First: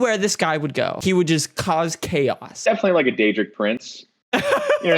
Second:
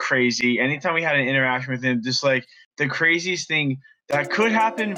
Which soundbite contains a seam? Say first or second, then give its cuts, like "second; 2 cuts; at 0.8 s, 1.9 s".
first; 2 cuts; at 1.0 s, 2.6 s